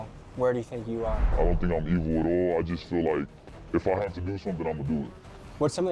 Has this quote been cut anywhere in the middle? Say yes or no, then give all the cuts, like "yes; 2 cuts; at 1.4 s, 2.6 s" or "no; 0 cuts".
no; 0 cuts